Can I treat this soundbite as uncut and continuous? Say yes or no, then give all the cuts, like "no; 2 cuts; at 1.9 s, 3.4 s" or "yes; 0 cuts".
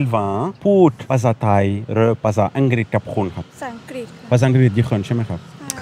yes; 0 cuts